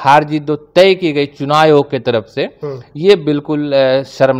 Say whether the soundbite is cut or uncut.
uncut